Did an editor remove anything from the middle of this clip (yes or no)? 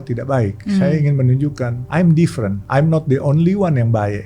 yes